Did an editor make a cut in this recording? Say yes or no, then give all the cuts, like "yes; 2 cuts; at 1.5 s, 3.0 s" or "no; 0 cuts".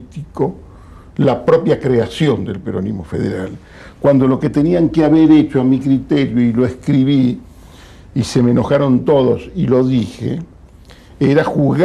yes; 1 cut; at 3.5 s